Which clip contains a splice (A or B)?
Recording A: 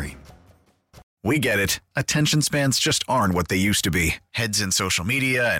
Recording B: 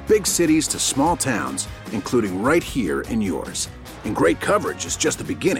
A